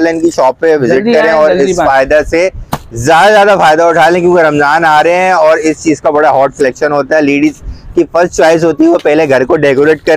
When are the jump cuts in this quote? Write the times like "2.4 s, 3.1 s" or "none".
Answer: none